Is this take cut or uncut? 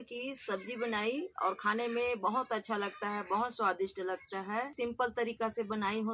cut